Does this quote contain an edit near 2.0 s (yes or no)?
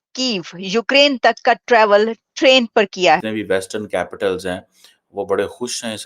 no